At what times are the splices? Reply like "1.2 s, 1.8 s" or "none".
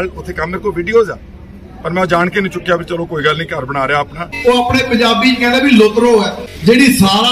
4.2 s, 6.4 s